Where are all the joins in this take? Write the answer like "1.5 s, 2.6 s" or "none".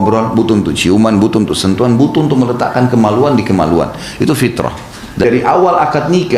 5.2 s